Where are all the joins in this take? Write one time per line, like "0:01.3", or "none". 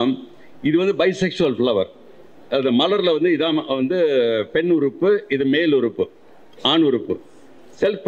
none